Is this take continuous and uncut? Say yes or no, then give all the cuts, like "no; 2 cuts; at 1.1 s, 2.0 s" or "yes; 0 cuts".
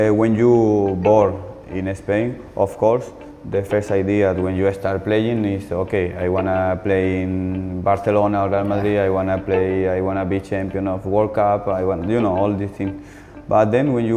yes; 0 cuts